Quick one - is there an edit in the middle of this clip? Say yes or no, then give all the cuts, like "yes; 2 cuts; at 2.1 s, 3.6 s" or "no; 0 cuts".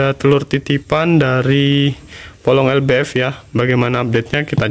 no; 0 cuts